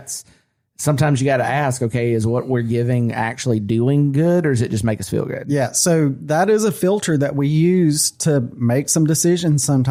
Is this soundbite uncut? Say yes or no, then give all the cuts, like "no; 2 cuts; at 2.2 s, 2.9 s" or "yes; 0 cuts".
yes; 0 cuts